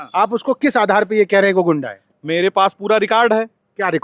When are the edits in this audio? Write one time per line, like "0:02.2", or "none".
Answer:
none